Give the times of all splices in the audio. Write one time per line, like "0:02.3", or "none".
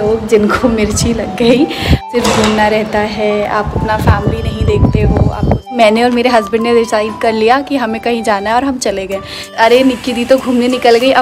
0:02.1
0:05.7
0:09.6